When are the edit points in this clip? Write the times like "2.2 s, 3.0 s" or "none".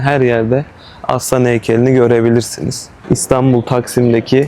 3.0 s